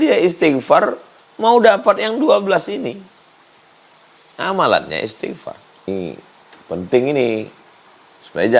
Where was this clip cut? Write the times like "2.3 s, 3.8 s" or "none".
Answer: 5.9 s